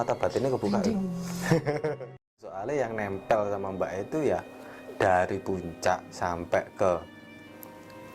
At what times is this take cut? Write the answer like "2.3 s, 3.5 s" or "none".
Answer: 2.6 s